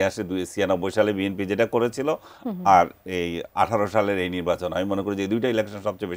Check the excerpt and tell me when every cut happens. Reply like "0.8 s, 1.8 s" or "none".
none